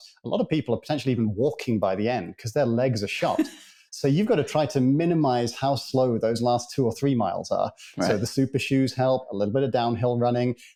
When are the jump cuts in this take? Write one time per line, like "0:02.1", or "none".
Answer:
none